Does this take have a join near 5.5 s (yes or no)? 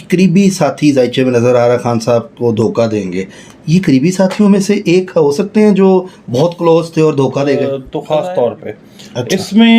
no